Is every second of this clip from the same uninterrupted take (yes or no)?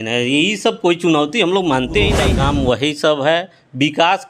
no